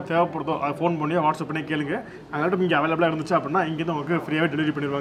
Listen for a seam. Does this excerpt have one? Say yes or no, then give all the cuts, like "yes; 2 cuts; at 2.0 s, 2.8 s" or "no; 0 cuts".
no; 0 cuts